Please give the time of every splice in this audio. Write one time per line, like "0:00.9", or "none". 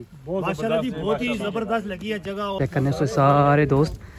0:02.5